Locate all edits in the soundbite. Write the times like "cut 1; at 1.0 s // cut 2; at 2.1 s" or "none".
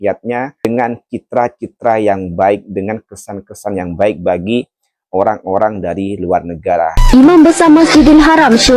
cut 1; at 7.0 s